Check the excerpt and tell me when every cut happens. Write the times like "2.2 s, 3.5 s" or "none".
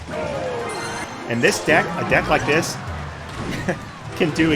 1.0 s